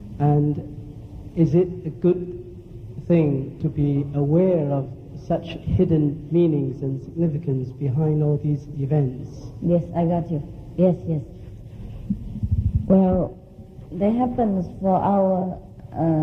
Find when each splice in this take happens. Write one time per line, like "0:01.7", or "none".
none